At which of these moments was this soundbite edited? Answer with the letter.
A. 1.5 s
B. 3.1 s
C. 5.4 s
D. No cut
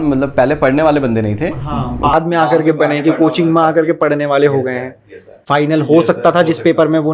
C